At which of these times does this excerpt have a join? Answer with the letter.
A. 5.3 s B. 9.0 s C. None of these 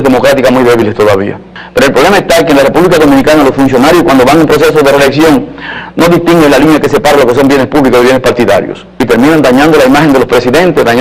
A